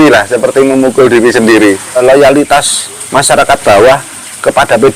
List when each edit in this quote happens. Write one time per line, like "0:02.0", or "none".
0:02.0